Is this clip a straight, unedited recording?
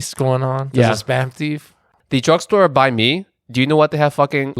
no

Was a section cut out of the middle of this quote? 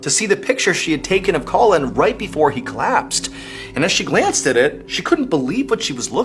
no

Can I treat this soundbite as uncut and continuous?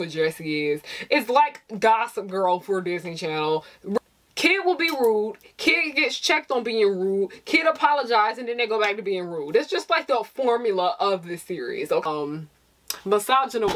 no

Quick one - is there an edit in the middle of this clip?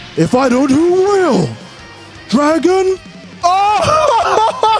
no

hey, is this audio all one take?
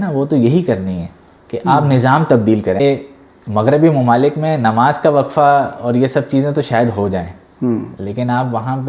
no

